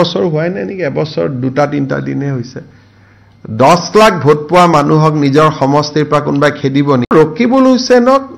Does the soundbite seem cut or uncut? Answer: cut